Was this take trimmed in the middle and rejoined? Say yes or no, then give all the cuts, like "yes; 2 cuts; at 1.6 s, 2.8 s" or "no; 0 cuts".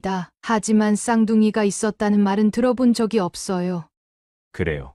yes; 1 cut; at 3.9 s